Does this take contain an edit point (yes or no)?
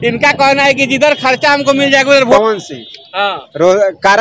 yes